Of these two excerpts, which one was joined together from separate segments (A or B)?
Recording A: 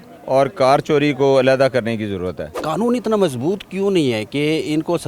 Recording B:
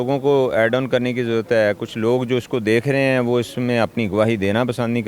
A